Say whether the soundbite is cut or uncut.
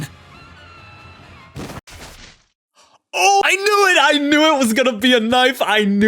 cut